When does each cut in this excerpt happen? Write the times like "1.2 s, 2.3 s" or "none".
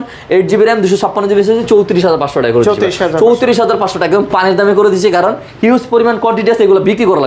none